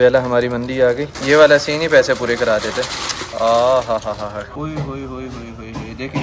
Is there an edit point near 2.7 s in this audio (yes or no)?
no